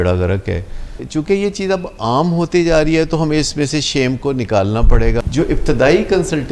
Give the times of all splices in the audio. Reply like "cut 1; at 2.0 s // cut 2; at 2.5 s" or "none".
cut 1; at 1.0 s // cut 2; at 5.2 s